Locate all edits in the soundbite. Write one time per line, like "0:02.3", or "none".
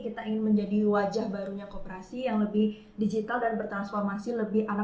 none